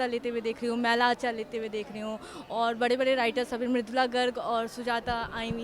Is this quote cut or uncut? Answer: uncut